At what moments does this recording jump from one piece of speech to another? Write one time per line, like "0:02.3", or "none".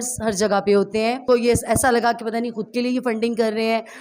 0:01.2